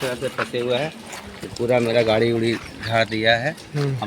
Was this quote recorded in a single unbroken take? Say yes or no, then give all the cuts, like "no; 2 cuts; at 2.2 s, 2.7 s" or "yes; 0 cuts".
yes; 0 cuts